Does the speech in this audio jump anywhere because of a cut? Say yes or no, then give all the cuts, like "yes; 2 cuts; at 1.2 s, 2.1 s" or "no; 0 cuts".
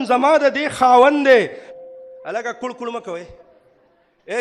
yes; 1 cut; at 1.6 s